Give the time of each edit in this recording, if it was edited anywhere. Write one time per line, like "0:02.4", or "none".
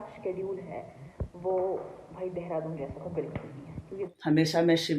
0:04.0